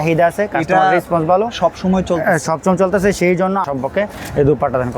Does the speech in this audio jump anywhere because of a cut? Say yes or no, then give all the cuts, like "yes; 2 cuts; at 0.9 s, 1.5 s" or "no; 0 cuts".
yes; 1 cut; at 3.6 s